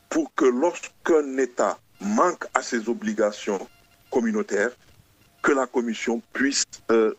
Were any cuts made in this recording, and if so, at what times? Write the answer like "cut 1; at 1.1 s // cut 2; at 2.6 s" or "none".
none